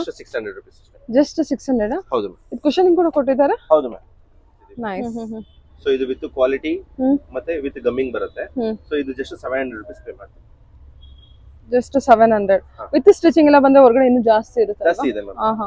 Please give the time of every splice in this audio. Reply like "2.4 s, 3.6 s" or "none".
5.0 s